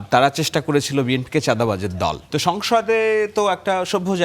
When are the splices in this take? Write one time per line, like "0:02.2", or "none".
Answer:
0:02.2